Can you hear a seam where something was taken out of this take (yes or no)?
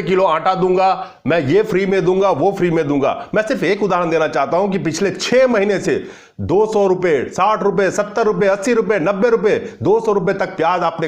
no